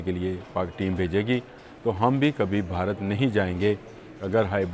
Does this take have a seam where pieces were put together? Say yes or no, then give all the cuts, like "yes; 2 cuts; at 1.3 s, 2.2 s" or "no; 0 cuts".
no; 0 cuts